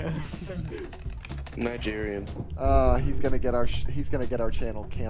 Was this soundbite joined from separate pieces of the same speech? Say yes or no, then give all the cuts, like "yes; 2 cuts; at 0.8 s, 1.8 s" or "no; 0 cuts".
no; 0 cuts